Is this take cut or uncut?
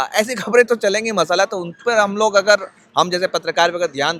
uncut